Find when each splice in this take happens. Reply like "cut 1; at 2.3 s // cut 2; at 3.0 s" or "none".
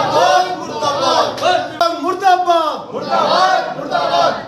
cut 1; at 1.8 s

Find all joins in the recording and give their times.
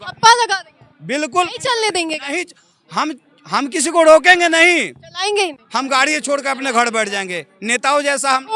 none

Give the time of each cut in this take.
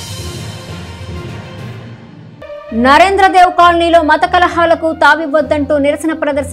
cut 1; at 2.6 s

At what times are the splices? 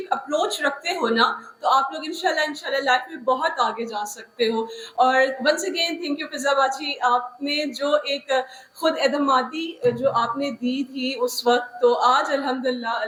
none

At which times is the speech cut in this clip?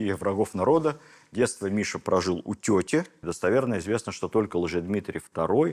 cut 1; at 3.2 s

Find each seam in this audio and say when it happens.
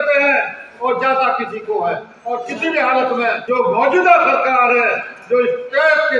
cut 1; at 2.2 s // cut 2; at 3.4 s

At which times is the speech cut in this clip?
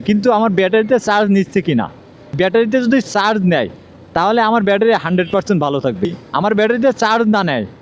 none

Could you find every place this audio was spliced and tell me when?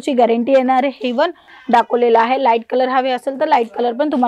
cut 1; at 1.5 s

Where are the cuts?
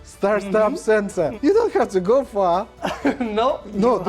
cut 1; at 1.3 s

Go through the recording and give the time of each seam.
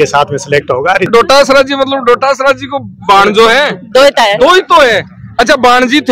cut 1; at 1.1 s

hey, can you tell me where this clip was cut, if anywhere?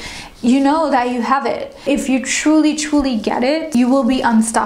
cut 1; at 1.8 s // cut 2; at 3.7 s

